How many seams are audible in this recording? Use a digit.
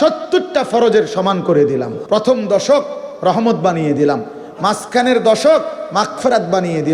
1